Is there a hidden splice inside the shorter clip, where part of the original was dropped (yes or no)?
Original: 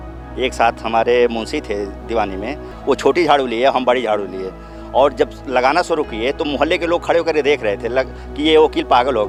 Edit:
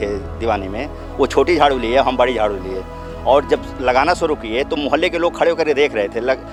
no